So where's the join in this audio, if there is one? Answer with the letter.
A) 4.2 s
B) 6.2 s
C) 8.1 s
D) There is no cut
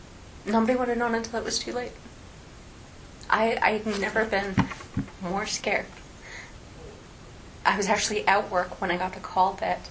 D